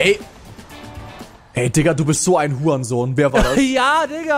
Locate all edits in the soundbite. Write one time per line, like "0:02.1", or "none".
0:03.3

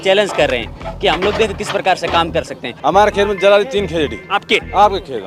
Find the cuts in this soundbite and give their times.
0:02.6

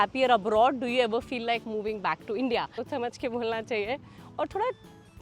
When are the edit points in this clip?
0:02.8

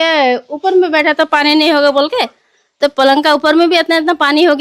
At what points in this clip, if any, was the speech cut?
none

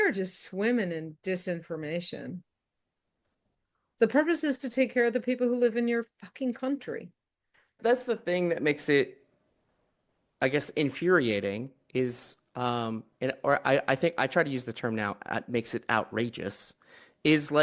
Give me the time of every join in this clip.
0:03.9
0:07.7

